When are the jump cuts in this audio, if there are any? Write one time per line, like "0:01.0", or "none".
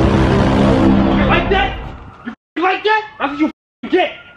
0:03.1